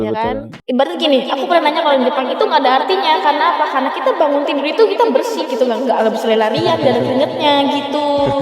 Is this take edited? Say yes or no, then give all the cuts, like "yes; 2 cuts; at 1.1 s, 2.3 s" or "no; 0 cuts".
no; 0 cuts